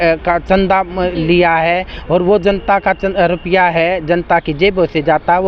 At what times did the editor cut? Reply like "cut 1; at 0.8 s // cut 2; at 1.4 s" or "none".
none